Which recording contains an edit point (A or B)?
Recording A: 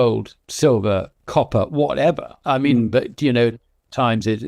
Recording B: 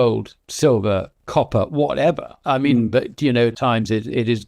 B